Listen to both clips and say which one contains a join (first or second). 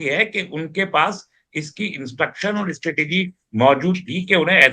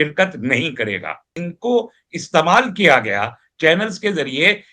second